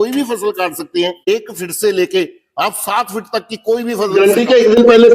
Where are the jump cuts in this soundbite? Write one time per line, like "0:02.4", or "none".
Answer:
0:01.3
0:04.1